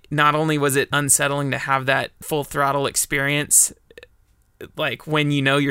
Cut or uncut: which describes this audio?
cut